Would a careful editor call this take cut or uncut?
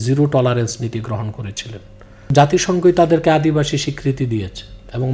cut